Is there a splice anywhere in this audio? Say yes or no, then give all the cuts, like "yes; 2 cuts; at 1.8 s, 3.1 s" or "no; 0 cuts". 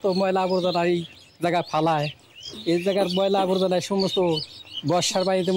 no; 0 cuts